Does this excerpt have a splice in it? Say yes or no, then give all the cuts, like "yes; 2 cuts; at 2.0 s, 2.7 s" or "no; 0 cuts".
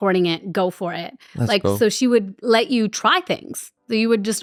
no; 0 cuts